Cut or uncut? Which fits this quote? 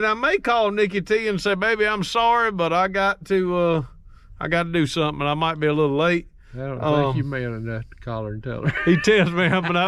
uncut